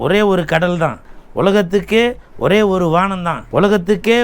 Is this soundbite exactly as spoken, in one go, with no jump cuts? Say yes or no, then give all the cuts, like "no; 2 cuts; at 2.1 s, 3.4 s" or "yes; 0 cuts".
yes; 0 cuts